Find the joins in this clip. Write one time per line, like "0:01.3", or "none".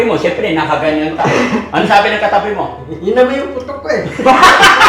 none